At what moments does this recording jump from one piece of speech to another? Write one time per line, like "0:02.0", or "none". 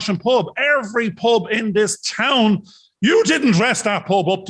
none